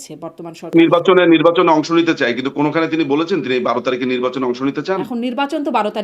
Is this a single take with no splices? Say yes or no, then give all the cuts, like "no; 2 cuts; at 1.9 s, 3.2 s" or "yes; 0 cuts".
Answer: no; 2 cuts; at 0.7 s, 5.1 s